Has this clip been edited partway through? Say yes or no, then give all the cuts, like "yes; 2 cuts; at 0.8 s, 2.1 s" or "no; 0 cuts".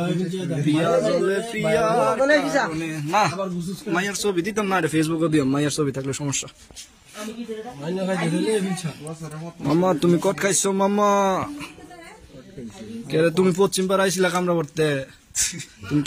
yes; 1 cut; at 8.4 s